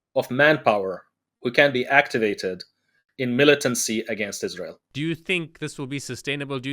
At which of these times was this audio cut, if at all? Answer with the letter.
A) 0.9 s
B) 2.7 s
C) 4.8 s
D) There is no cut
C